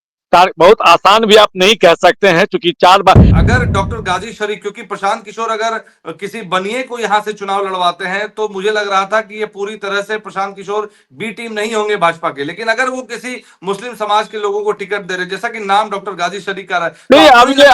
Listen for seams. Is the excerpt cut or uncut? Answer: cut